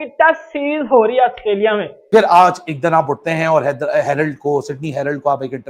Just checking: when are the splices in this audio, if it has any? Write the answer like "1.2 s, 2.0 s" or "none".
1.9 s